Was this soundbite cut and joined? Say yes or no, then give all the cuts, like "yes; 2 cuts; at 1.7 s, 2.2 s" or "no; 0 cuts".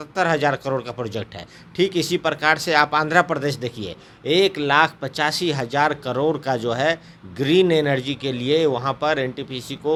no; 0 cuts